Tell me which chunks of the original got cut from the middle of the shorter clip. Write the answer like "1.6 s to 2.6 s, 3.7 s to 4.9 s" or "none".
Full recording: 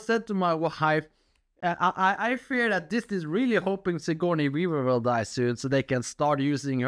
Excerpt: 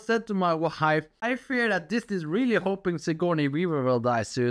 1.2 s to 2.2 s

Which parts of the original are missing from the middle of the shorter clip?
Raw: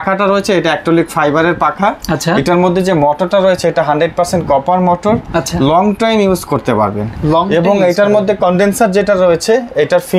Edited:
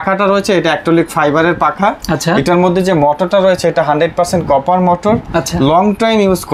none

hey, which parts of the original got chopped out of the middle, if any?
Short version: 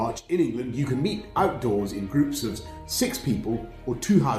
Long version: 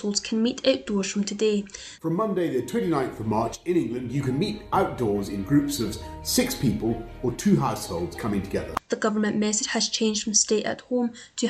none

